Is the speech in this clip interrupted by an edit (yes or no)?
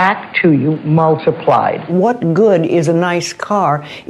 yes